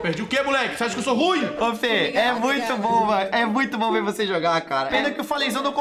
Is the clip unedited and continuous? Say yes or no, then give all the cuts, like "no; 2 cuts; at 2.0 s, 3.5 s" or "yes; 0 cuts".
no; 1 cut; at 1.5 s